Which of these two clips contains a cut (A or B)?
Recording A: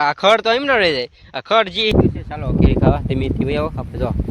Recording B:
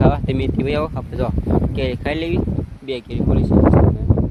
A